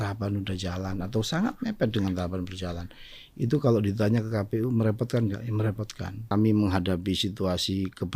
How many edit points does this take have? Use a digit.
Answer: 1